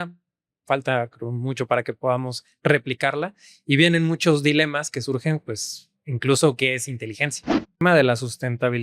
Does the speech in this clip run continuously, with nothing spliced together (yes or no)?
no